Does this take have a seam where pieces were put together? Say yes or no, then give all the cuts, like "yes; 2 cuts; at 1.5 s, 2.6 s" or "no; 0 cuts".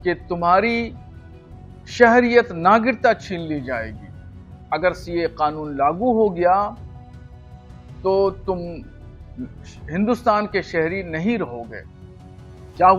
no; 0 cuts